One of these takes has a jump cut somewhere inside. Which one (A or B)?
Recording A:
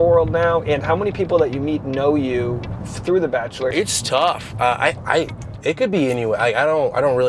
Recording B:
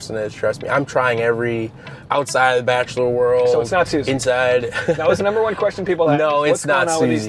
A